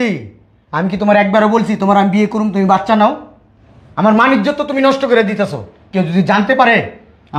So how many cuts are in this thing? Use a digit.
0